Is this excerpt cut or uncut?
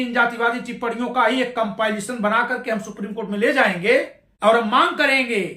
cut